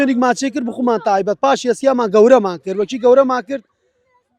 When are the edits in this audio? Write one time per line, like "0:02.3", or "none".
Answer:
none